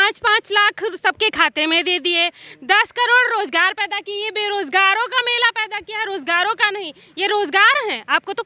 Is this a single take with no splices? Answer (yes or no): yes